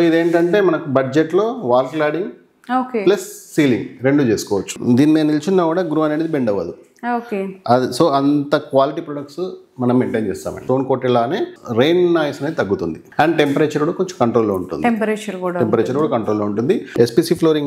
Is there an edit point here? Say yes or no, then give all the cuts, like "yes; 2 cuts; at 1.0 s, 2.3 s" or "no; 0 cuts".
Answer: yes; 4 cuts; at 4.7 s, 10.6 s, 13.0 s, 17.0 s